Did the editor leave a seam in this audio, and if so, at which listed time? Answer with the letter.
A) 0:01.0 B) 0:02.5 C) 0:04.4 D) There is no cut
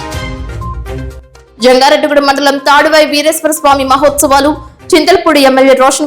A